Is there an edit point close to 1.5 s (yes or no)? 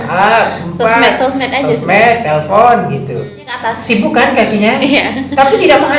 no